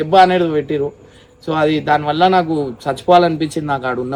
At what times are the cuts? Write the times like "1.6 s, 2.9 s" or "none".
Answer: none